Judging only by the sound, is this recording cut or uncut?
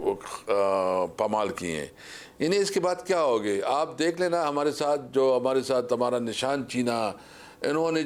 uncut